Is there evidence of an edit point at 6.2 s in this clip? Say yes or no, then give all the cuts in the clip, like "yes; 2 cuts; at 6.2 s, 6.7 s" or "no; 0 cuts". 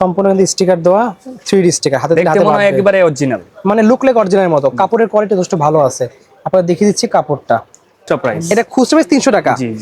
no; 1 cut; at 8.0 s